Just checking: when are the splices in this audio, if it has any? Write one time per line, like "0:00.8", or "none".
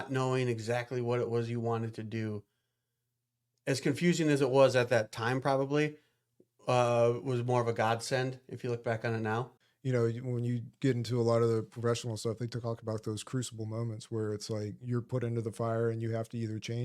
0:09.6